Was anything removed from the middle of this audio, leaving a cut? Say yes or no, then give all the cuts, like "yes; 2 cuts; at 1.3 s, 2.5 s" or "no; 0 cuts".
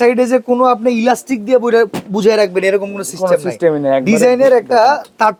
no; 0 cuts